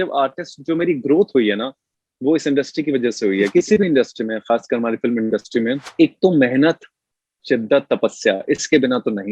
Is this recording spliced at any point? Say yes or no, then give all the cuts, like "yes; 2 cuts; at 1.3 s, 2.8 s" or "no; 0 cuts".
yes; 2 cuts; at 3.5 s, 5.9 s